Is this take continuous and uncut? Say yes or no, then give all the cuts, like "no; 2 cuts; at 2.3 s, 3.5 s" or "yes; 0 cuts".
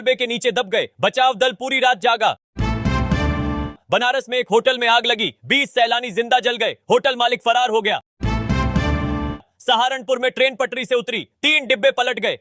no; 4 cuts; at 2.5 s, 3.6 s, 8.1 s, 9.4 s